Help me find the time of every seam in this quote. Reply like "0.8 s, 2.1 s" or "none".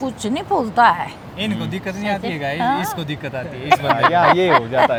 none